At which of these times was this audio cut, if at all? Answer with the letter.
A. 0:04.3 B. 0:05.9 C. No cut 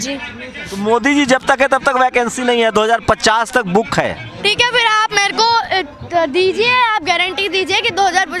A